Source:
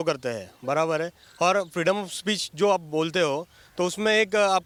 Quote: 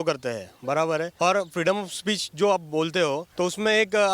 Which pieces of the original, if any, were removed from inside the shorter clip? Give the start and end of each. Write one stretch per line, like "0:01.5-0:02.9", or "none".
0:01.1-0:01.3
0:03.5-0:03.7